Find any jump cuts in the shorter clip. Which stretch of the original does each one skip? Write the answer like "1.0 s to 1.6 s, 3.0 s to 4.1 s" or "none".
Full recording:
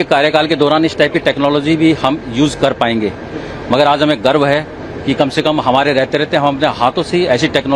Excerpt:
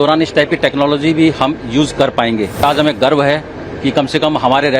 3.3 s to 3.9 s